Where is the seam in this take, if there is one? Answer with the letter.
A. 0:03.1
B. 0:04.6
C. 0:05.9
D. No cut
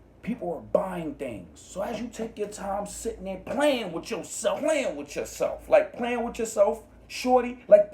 B